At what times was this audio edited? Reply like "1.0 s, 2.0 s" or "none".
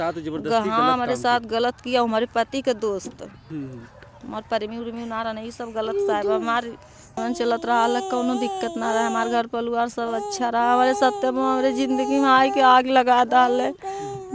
7.2 s